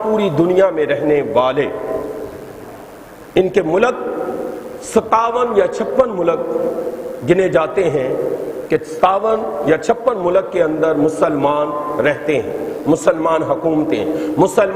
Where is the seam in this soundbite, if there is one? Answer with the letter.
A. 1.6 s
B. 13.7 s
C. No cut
C